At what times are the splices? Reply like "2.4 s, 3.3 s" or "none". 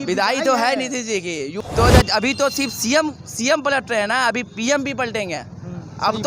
1.5 s